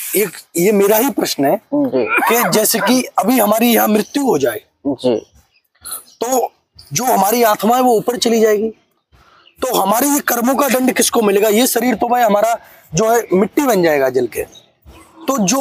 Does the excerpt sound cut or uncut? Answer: uncut